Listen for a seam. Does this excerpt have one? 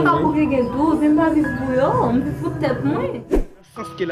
yes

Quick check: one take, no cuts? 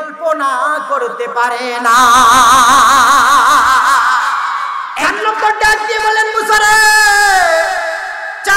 no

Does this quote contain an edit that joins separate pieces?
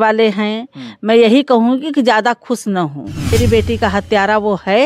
yes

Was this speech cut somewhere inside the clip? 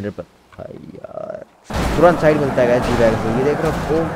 yes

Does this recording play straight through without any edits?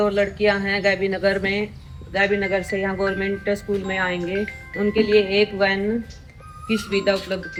yes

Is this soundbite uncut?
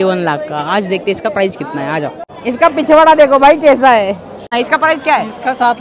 no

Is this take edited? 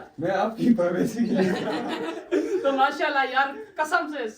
yes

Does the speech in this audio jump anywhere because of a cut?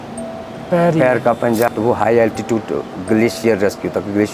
yes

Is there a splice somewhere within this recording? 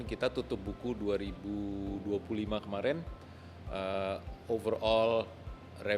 no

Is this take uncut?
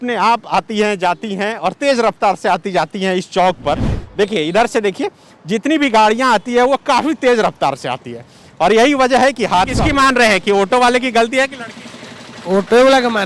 no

